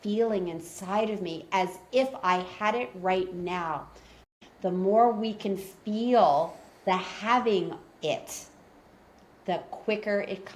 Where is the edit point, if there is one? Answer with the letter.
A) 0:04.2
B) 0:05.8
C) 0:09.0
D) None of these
A